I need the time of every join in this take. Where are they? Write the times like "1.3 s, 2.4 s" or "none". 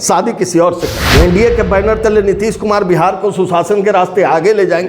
1.0 s